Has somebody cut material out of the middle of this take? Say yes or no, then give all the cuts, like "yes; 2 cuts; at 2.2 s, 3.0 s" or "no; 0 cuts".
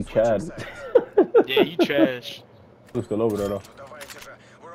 yes; 1 cut; at 3.0 s